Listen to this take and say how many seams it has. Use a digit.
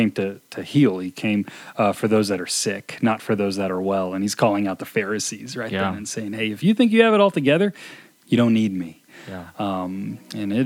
0